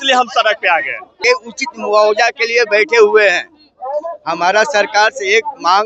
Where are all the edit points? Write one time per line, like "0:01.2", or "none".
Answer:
0:01.2